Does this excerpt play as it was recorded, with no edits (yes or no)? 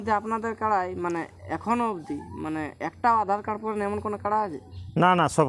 yes